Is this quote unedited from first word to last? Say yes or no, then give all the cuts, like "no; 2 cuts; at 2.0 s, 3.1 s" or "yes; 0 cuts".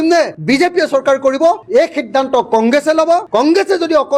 yes; 0 cuts